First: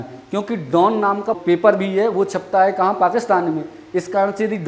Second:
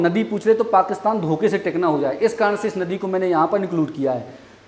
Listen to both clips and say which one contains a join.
first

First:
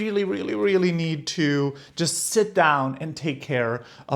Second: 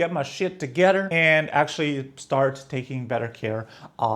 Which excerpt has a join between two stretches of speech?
second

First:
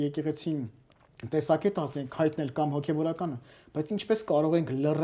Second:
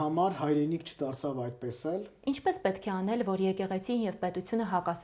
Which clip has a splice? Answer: second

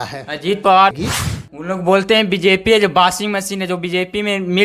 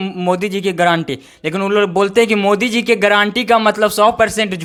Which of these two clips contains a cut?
first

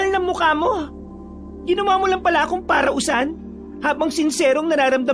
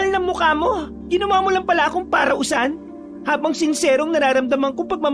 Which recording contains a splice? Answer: second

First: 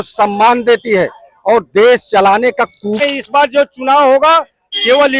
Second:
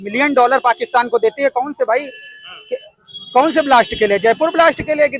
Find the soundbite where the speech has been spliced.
first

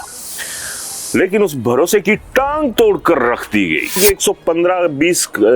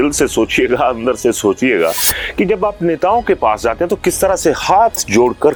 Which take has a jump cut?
first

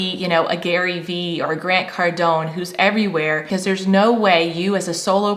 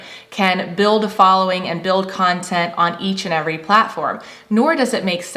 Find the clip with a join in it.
first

